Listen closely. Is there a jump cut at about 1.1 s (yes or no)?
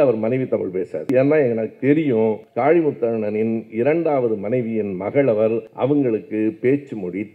yes